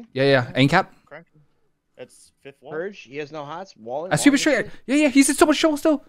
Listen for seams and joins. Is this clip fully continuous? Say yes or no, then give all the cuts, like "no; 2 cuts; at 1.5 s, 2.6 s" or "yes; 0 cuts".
yes; 0 cuts